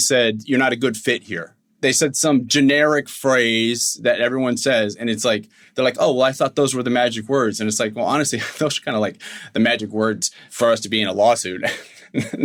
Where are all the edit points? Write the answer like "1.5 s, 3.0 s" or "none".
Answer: none